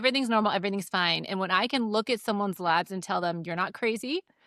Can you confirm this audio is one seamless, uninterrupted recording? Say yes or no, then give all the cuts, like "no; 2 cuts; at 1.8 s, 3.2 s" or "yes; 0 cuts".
yes; 0 cuts